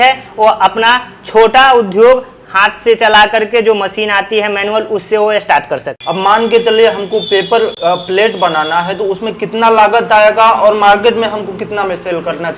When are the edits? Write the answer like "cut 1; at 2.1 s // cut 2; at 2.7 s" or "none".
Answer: cut 1; at 5.9 s // cut 2; at 7.7 s